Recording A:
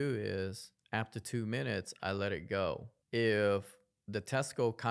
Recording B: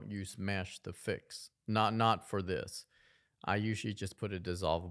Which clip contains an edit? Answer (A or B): A